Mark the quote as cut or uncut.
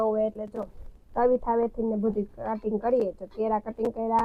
uncut